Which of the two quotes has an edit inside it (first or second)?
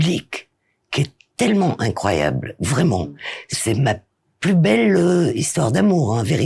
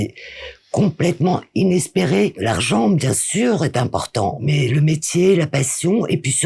second